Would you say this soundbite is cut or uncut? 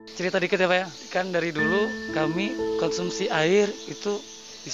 cut